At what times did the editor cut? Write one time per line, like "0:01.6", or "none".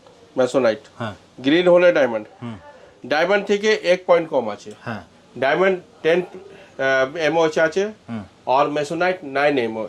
none